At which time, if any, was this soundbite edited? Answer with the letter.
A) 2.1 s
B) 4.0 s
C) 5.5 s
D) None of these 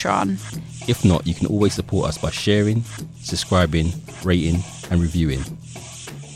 C